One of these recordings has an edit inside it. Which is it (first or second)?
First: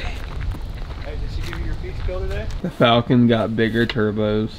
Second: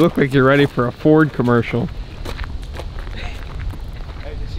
first